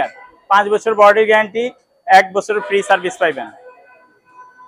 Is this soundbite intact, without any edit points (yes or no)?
yes